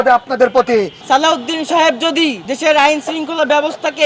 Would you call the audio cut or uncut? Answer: cut